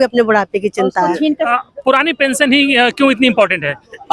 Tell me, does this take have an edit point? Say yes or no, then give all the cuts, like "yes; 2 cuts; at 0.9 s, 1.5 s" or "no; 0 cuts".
yes; 1 cut; at 1.5 s